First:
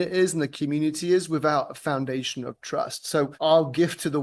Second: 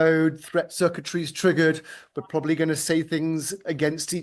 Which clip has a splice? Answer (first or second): first